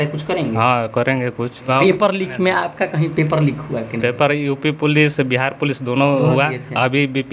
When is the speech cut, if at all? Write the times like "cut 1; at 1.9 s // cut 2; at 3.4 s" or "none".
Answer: cut 1; at 1.7 s